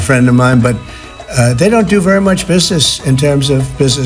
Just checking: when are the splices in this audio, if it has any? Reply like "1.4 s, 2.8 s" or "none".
none